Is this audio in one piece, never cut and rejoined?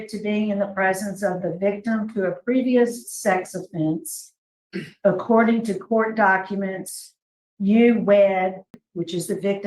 no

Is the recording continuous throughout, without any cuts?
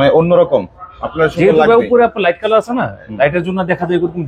yes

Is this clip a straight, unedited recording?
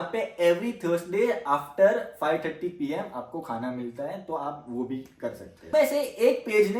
no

